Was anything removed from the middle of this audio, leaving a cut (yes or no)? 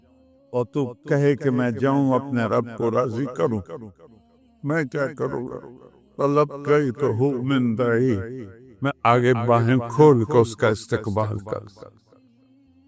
yes